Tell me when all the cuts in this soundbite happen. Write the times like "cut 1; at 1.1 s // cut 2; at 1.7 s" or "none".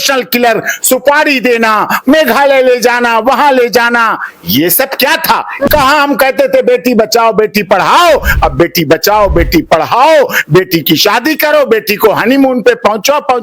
cut 1; at 5.7 s